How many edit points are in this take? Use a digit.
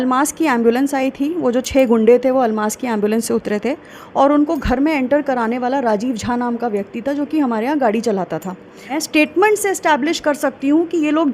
1